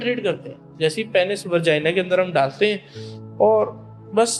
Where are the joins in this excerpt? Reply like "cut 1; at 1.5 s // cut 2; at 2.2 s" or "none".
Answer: none